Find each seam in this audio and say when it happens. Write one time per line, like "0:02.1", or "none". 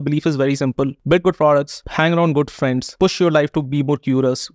0:01.0
0:01.8
0:02.9

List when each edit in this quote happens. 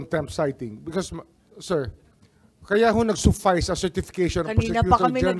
none

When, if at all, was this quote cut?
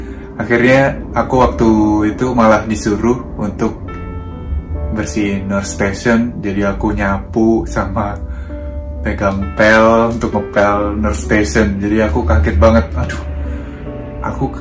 none

